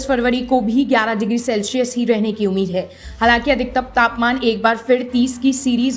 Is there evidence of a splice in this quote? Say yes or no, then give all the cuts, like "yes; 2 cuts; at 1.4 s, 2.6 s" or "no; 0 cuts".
no; 0 cuts